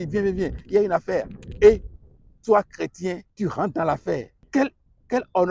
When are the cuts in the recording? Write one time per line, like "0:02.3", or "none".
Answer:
0:03.3
0:04.4

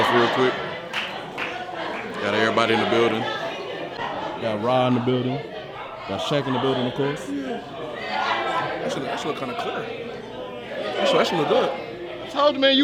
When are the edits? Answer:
none

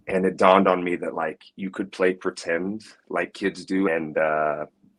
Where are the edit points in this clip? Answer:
0:03.9

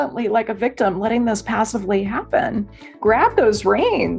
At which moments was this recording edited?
0:03.0

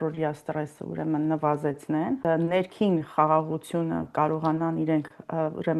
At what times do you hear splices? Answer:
0:02.2

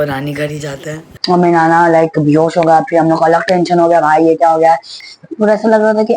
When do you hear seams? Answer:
0:01.1
0:05.0

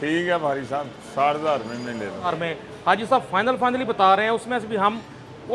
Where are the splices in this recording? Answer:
0:02.3

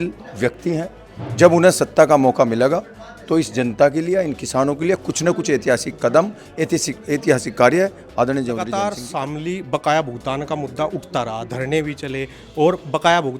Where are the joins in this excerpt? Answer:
0:09.0

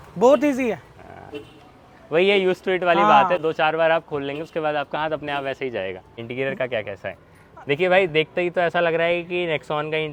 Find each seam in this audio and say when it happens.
none

